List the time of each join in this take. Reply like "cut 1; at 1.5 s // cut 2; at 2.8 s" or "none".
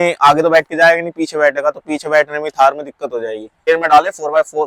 cut 1; at 3.6 s